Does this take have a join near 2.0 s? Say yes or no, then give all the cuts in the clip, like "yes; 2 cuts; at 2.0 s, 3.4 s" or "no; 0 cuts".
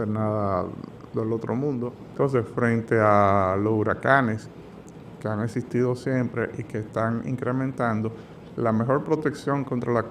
yes; 1 cut; at 2.0 s